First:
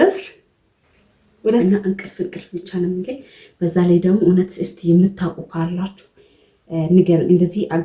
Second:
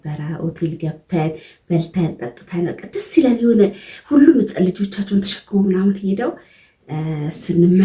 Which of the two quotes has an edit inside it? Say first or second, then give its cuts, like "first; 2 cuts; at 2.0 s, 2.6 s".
first; 1 cut; at 1.6 s